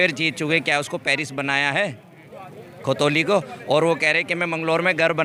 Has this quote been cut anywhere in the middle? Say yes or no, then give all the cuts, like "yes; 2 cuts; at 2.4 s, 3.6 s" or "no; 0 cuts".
no; 0 cuts